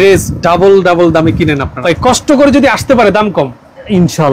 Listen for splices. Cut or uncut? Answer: cut